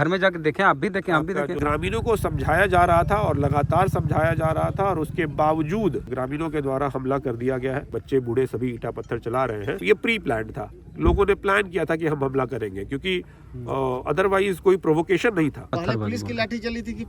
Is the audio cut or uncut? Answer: cut